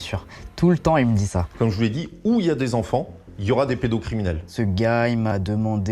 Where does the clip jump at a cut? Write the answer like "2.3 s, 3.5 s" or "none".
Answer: 1.4 s, 4.5 s